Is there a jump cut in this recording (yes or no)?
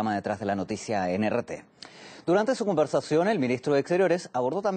yes